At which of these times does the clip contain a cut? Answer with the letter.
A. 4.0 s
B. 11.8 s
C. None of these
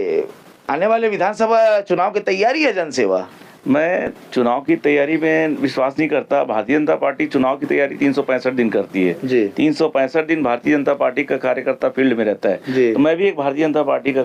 C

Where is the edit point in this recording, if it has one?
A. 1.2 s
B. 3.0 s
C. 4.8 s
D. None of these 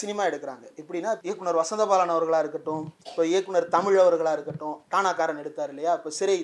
A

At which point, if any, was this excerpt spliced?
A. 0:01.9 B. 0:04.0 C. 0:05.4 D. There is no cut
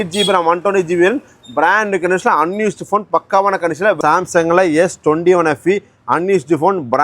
B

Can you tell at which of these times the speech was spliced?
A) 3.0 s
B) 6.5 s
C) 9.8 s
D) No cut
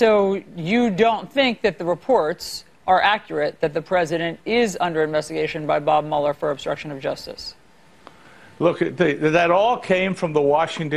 A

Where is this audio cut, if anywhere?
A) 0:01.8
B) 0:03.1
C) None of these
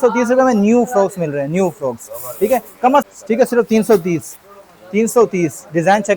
B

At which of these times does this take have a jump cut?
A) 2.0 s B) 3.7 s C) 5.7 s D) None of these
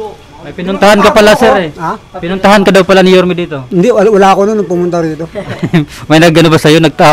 D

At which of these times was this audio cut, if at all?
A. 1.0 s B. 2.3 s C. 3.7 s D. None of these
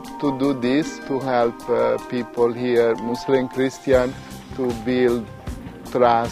A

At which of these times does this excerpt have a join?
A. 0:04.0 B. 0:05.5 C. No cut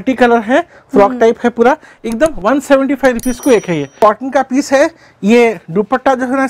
A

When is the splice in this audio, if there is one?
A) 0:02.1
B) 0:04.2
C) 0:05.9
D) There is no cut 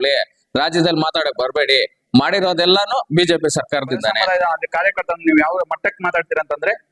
B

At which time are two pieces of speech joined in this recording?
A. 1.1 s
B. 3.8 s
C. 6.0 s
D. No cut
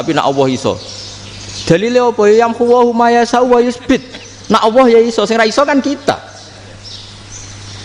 D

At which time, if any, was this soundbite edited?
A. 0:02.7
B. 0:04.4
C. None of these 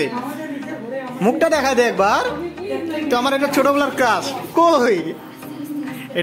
B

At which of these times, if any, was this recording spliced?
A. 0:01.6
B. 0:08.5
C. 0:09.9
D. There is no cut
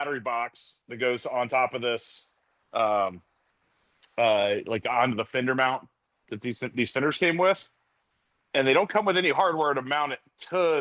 D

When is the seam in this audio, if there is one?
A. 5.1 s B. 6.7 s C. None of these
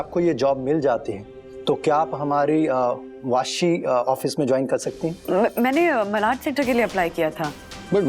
A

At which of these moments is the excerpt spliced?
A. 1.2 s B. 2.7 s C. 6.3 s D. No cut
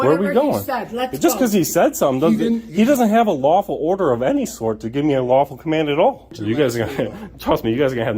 C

